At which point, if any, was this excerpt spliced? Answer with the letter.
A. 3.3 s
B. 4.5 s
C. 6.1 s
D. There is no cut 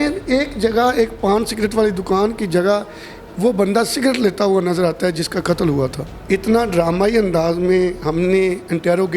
C